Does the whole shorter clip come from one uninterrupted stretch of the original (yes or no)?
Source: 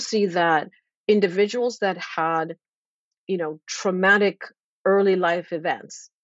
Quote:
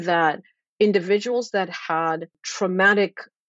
no